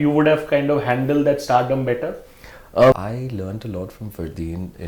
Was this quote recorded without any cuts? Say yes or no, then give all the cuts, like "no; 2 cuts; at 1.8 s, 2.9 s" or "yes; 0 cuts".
no; 1 cut; at 2.9 s